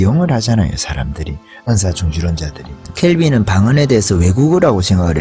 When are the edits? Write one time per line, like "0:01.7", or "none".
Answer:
none